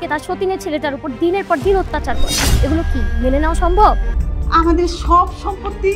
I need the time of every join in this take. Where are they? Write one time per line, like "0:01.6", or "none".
0:04.1